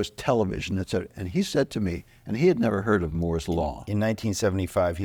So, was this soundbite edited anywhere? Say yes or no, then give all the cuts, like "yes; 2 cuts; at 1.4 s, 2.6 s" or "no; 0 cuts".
no; 0 cuts